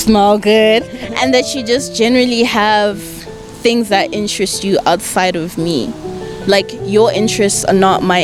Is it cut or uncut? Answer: uncut